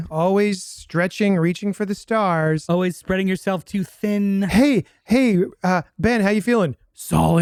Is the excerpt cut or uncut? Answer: uncut